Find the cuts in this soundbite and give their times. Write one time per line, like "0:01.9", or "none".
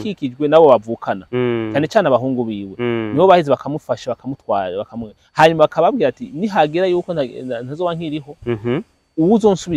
none